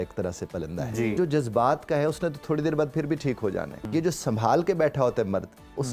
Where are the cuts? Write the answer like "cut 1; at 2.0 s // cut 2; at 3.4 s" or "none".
cut 1; at 1.2 s // cut 2; at 3.8 s